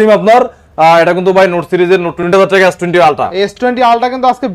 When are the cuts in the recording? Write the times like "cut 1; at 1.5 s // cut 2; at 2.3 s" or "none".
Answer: cut 1; at 2.3 s

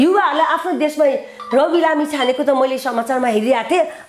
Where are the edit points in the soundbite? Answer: none

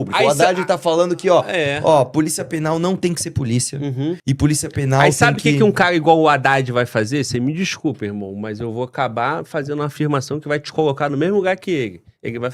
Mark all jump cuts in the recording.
cut 1; at 4.2 s

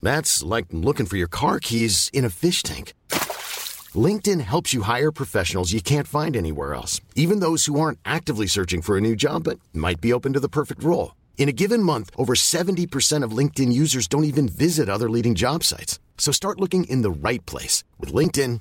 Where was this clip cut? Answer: none

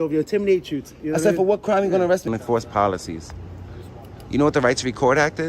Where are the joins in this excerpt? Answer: cut 1; at 2.3 s

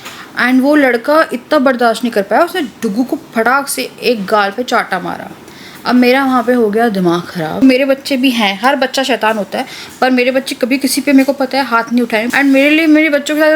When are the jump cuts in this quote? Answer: cut 1; at 7.6 s // cut 2; at 12.2 s

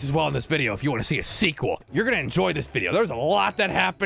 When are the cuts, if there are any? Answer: cut 1; at 1.9 s

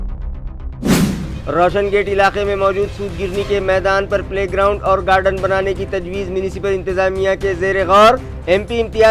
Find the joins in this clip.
cut 1; at 0.9 s

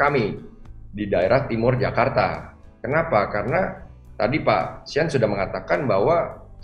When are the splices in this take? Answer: none

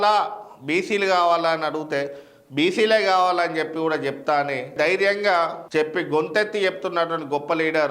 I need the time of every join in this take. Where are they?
cut 1; at 4.7 s

